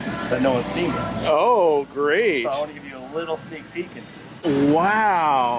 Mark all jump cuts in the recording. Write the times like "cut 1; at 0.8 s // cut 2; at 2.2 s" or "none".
cut 1; at 4.2 s

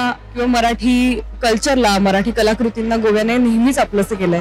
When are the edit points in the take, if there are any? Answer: none

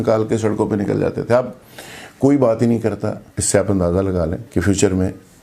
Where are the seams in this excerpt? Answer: cut 1; at 3.3 s // cut 2; at 4.4 s

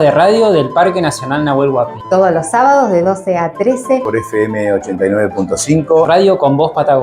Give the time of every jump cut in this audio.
cut 1; at 6.1 s

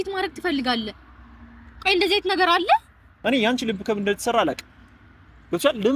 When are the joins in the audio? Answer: cut 1; at 3.0 s

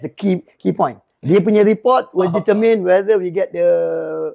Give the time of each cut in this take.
none

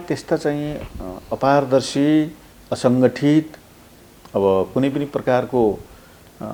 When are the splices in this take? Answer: none

